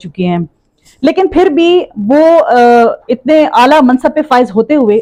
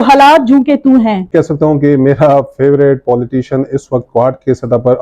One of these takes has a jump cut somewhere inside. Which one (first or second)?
second